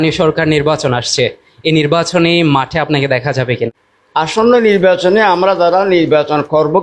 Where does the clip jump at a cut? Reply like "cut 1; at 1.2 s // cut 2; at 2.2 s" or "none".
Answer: cut 1; at 3.7 s